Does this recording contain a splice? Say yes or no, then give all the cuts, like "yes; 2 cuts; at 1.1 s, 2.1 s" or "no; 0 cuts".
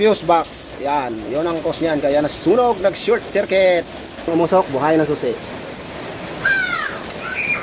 yes; 1 cut; at 4.3 s